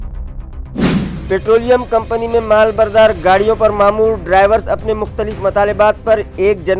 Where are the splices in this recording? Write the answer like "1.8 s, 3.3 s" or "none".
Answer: 1.2 s